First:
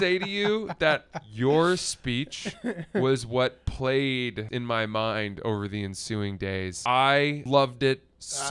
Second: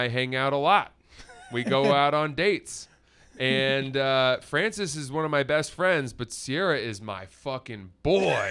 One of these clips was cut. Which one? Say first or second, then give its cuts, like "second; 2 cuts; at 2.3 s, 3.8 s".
first; 3 cuts; at 4.5 s, 6.7 s, 7.4 s